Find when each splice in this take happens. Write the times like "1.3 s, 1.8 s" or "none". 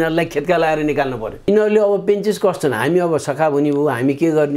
1.4 s